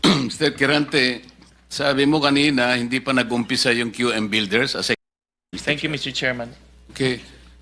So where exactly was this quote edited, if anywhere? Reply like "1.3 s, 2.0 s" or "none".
5.0 s

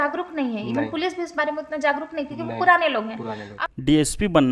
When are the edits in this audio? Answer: 3.4 s

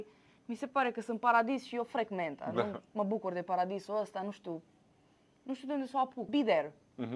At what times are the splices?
6.3 s

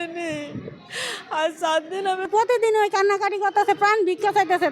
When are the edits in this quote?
2.3 s

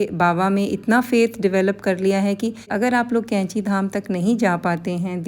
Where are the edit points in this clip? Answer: 2.7 s

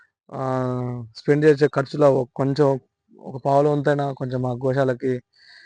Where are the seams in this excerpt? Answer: none

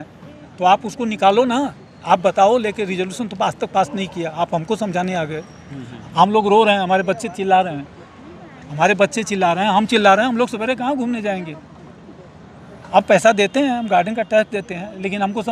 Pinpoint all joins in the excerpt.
none

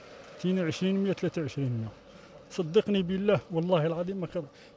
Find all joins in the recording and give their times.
none

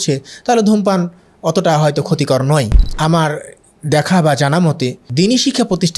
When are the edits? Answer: 2.8 s, 5.0 s

